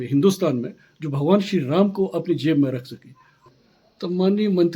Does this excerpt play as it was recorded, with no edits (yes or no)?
no